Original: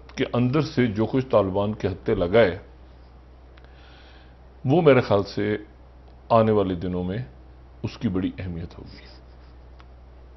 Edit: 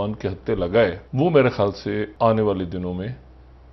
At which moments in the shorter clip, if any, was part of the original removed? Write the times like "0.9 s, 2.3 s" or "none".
1.0 s, 2.1 s